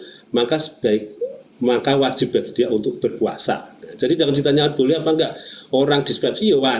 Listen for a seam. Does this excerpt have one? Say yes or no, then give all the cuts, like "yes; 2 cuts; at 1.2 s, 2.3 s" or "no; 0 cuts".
no; 0 cuts